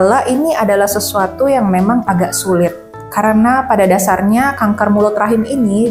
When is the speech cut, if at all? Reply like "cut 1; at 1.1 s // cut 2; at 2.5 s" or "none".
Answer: none